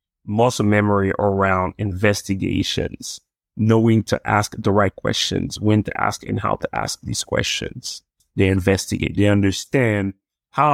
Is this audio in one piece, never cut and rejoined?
no; 1 cut; at 8.2 s

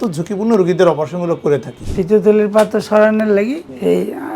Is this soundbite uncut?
no; 1 cut; at 1.8 s

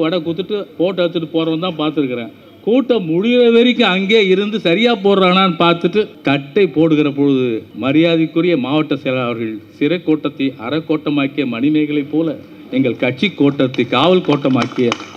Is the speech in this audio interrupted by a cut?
yes; 2 cuts; at 6.2 s, 7.7 s

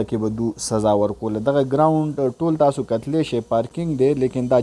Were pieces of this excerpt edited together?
no; 0 cuts

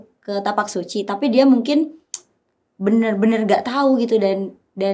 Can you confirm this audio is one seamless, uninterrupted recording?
yes; 0 cuts

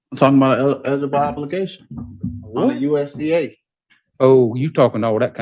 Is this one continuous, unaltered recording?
yes; 0 cuts

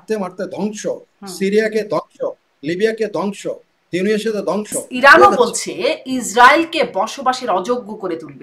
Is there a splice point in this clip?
yes; 1 cut; at 4.8 s

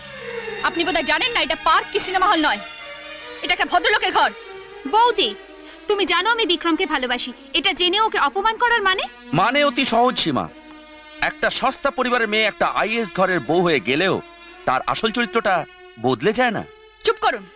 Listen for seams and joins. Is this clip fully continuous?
yes; 0 cuts

